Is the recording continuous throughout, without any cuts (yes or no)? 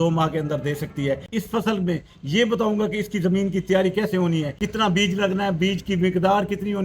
no